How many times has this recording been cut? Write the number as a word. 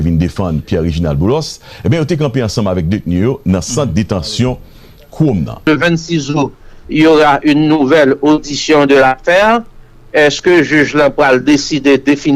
one